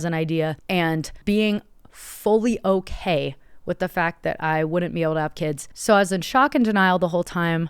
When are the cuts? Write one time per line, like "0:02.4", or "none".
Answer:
0:05.6